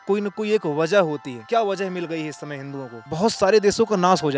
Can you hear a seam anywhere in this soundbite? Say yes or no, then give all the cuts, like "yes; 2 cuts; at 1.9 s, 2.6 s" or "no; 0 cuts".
yes; 2 cuts; at 1.3 s, 3.0 s